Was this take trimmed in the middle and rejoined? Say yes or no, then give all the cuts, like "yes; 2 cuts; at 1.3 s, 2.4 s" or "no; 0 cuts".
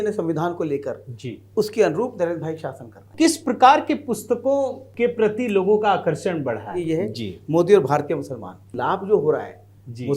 yes; 4 cuts; at 3.1 s, 4.8 s, 6.8 s, 8.7 s